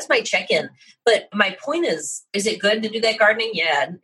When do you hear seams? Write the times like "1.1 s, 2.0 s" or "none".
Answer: 1.1 s, 2.4 s

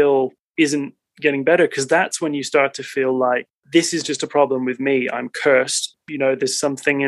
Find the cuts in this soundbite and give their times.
6.0 s

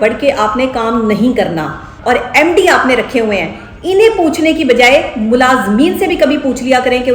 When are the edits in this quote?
1.9 s

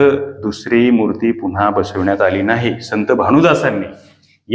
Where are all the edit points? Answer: none

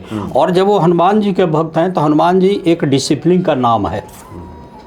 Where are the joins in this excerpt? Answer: none

